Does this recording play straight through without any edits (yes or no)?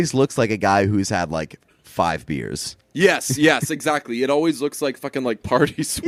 yes